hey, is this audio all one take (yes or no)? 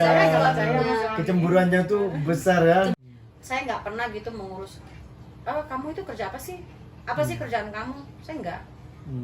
no